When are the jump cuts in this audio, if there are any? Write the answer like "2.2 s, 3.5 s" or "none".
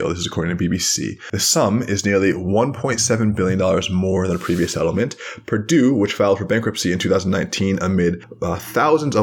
1.3 s, 8.3 s